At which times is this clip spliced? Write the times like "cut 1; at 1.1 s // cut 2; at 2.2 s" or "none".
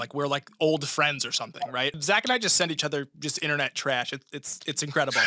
cut 1; at 2.0 s

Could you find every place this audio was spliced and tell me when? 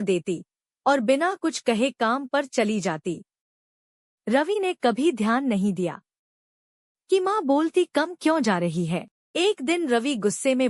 cut 1; at 9.2 s

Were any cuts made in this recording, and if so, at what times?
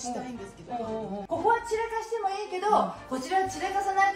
cut 1; at 1.2 s

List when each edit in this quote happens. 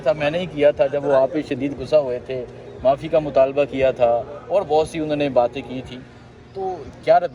none

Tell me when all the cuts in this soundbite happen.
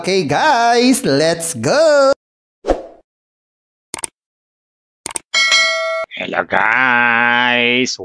cut 1; at 6.0 s

